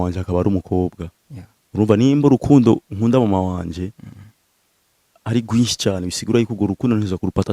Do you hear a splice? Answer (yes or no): no